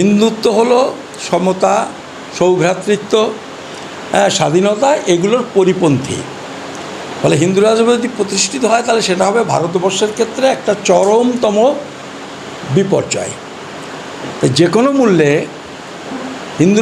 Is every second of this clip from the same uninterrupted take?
yes; 0 cuts

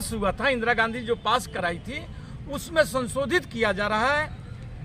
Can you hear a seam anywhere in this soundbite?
no; 0 cuts

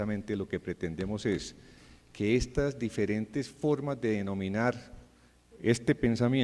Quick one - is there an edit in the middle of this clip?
yes; 1 cut; at 2.5 s

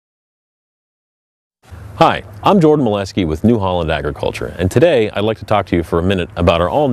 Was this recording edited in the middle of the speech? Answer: no; 0 cuts

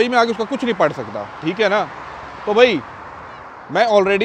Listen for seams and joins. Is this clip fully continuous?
yes; 0 cuts

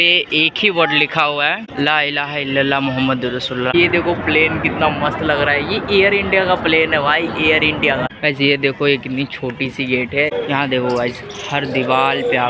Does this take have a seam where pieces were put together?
yes; 4 cuts; at 1.7 s, 3.7 s, 8.1 s, 10.3 s

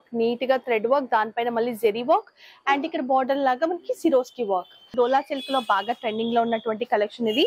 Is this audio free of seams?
no; 1 cut; at 4.9 s

